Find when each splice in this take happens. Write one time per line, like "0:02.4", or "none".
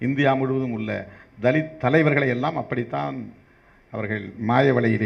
none